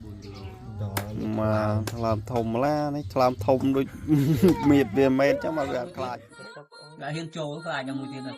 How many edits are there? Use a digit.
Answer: 1